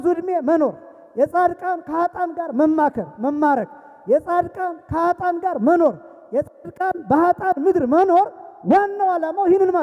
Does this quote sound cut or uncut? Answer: uncut